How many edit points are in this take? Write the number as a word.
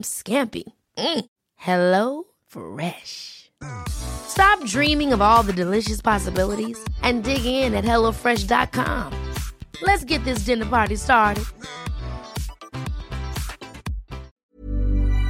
one